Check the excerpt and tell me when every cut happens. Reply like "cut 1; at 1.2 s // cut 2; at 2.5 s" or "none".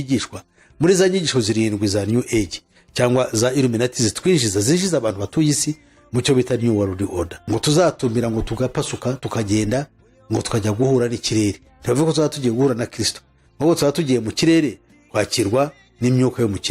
cut 1; at 7.4 s